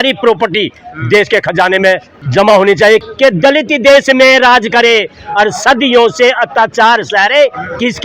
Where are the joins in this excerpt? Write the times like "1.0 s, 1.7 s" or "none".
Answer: 2.2 s, 3.0 s